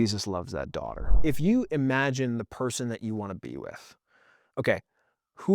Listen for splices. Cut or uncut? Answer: cut